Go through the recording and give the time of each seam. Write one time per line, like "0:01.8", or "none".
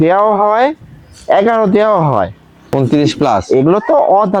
0:02.7